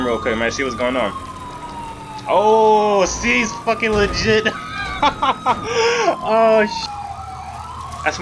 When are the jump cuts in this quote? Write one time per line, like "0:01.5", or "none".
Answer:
0:06.9